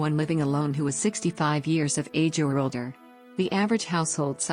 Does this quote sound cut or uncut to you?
uncut